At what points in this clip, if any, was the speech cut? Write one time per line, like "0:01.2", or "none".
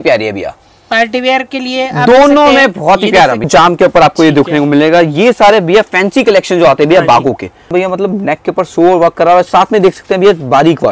0:03.5
0:07.6